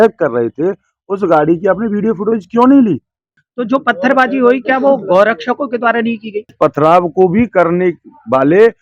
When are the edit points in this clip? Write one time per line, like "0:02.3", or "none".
0:03.5
0:06.5